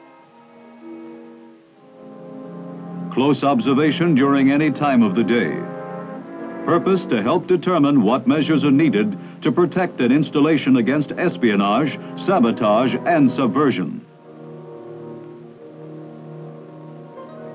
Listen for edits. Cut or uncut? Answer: uncut